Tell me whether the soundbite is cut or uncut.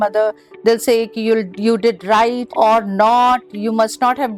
uncut